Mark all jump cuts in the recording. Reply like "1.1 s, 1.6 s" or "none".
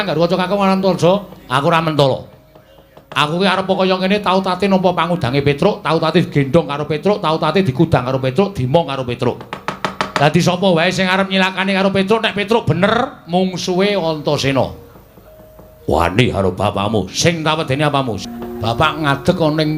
18.2 s